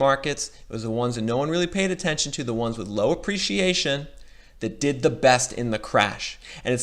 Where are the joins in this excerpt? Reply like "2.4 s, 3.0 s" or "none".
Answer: none